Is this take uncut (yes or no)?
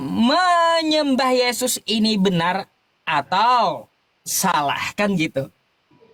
yes